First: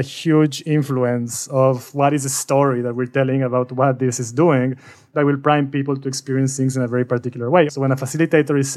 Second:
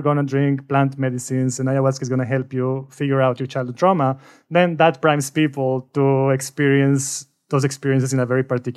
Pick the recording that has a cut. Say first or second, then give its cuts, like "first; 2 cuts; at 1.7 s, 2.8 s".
first; 1 cut; at 7.7 s